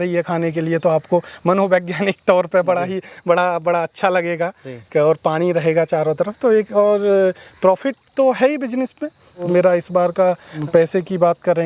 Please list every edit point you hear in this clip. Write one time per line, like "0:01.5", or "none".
0:09.5
0:10.5